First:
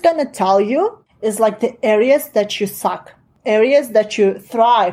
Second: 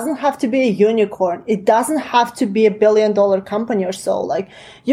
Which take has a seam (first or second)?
first